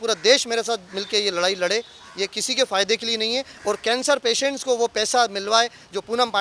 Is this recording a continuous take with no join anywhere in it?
yes; 0 cuts

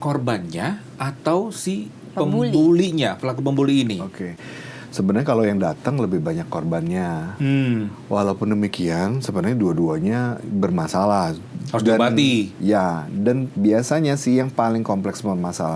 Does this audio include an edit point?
no; 0 cuts

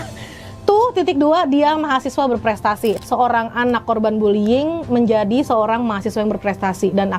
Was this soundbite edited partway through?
yes; 1 cut; at 3.0 s

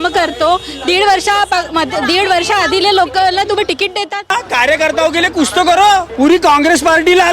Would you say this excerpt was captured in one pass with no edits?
no; 2 cuts; at 4.3 s, 6.1 s

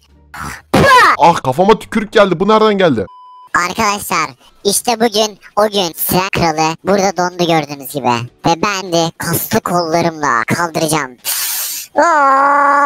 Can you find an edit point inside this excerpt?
yes; 2 cuts; at 3.4 s, 8.8 s

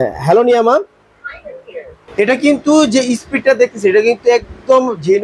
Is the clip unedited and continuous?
no; 1 cut; at 2.0 s

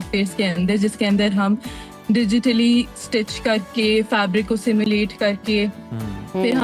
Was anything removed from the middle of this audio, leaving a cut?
no; 0 cuts

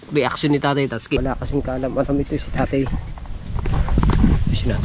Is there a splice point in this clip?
yes; 1 cut; at 1.2 s

